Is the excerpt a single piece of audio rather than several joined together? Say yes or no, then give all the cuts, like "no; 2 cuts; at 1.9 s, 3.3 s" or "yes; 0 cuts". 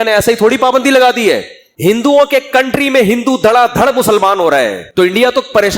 no; 1 cut; at 4.8 s